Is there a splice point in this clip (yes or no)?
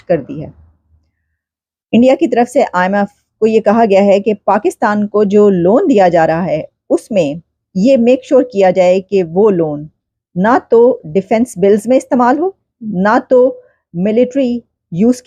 no